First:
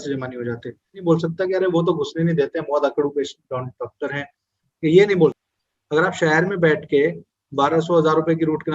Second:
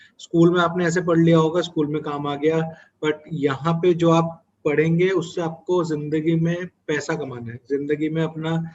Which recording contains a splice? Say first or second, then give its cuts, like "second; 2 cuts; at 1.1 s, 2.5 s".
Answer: first; 2 cuts; at 1.0 s, 5.5 s